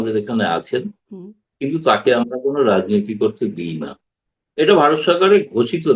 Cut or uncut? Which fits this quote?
uncut